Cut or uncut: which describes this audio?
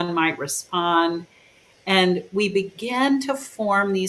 uncut